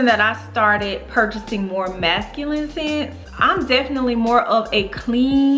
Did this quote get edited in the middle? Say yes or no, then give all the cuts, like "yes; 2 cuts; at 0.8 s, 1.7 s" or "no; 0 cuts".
no; 0 cuts